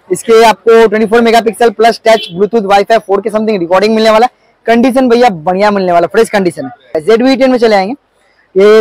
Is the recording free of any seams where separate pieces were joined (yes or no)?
no